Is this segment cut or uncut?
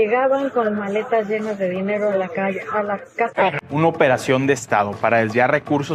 cut